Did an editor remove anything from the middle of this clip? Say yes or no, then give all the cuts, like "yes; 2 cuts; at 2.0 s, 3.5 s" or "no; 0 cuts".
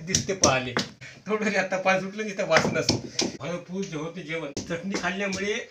yes; 3 cuts; at 1.0 s, 3.4 s, 4.5 s